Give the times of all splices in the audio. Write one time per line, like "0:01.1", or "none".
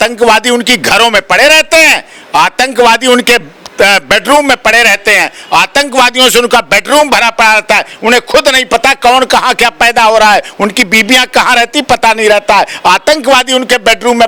none